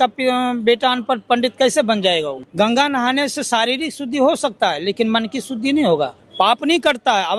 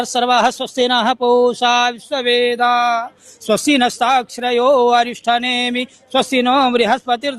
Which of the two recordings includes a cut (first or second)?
first